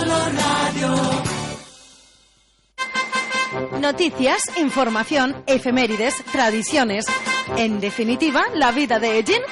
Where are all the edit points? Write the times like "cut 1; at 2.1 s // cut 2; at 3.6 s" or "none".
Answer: cut 1; at 2.7 s